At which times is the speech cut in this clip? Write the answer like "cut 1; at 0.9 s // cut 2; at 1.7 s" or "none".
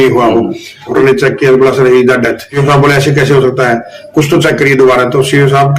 cut 1; at 0.9 s // cut 2; at 2.6 s